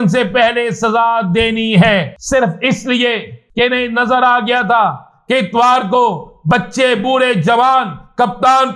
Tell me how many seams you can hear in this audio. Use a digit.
2